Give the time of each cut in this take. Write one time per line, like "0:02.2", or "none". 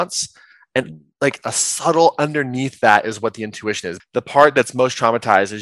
0:03.9